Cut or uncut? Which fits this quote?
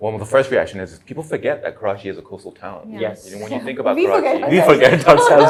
uncut